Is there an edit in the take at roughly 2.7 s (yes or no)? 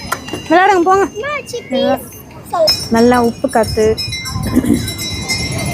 yes